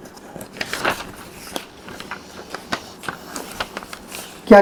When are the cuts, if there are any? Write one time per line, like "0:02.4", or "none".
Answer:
none